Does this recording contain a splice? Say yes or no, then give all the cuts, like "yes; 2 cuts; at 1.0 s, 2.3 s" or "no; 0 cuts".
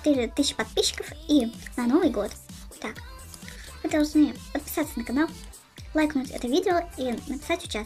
yes; 1 cut; at 3.2 s